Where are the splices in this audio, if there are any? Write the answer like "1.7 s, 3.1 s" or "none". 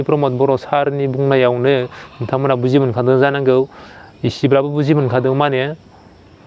none

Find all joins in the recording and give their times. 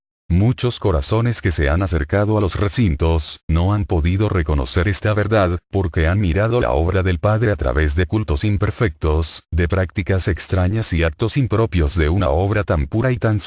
10.8 s

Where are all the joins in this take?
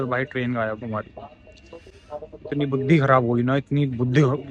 none

